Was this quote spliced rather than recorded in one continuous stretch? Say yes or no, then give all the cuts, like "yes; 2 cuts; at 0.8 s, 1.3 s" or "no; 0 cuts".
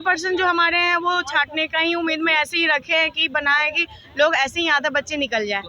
no; 0 cuts